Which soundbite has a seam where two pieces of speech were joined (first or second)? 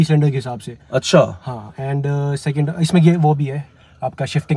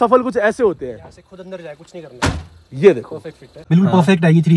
second